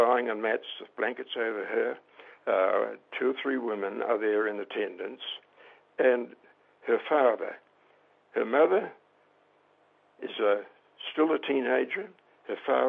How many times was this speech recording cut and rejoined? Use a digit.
0